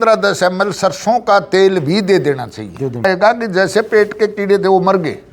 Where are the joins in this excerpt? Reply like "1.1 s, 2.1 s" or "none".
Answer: 3.0 s